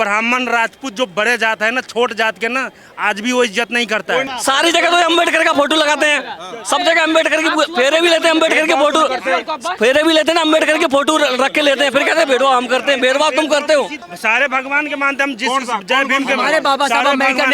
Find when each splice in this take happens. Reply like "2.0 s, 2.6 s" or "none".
4.3 s, 14.1 s